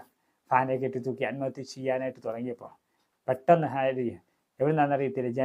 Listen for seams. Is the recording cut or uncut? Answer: uncut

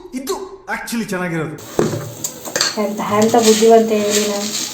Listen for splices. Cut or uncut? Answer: cut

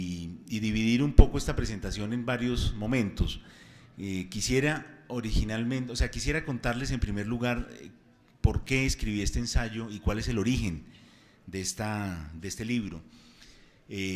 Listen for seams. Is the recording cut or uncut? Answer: cut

